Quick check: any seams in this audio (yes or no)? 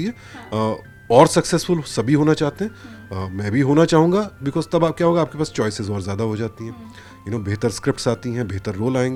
no